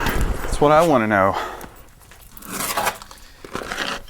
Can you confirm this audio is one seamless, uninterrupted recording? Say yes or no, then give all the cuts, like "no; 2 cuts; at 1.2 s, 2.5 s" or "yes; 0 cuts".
no; 1 cut; at 1.6 s